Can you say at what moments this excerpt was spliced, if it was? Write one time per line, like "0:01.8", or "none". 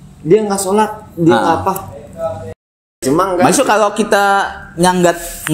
0:02.5